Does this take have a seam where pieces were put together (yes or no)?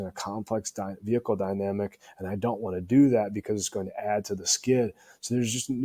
no